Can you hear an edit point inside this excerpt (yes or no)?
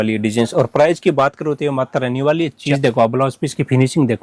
yes